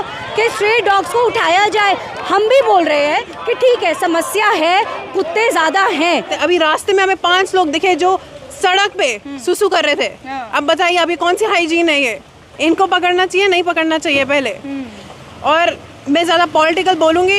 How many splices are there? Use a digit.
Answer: 1